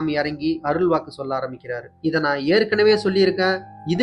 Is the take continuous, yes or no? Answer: no